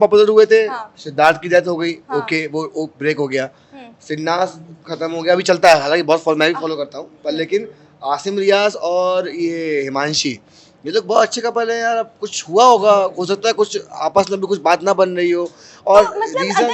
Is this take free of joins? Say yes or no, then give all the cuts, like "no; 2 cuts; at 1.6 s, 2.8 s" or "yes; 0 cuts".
yes; 0 cuts